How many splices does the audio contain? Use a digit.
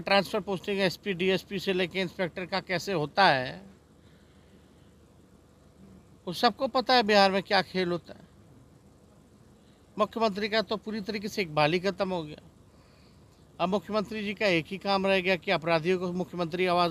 0